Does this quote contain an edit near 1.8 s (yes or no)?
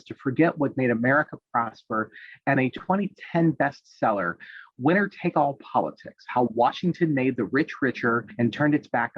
no